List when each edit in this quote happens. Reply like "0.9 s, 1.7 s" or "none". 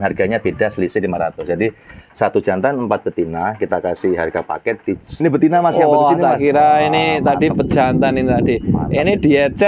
5.2 s